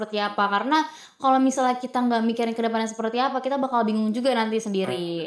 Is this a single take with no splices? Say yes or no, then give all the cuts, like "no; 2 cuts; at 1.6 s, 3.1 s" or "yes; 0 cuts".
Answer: yes; 0 cuts